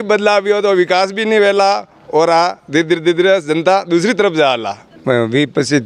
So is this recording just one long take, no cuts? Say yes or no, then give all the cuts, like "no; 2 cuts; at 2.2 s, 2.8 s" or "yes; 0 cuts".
no; 1 cut; at 4.9 s